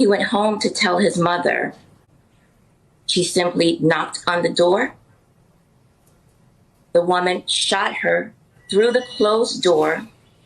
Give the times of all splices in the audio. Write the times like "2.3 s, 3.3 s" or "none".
2.0 s